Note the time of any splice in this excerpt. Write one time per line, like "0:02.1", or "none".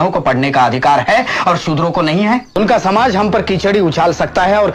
0:02.6